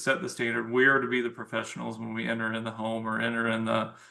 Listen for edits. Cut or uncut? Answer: uncut